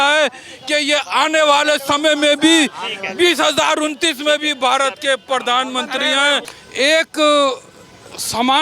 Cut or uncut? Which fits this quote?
cut